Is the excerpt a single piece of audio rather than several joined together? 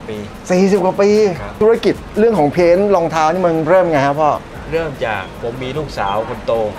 no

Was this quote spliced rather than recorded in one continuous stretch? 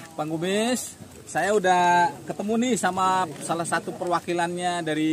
no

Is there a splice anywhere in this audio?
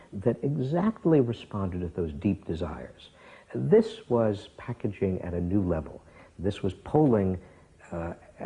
no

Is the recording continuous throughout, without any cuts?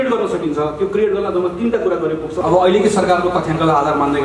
no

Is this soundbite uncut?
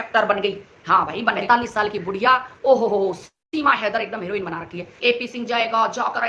no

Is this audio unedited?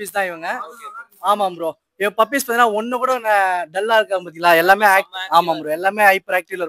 yes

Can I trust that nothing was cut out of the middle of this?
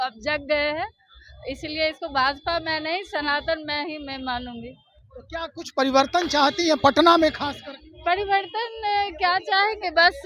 yes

